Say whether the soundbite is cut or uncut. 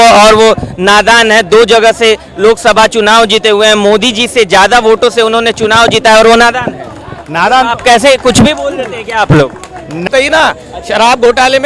cut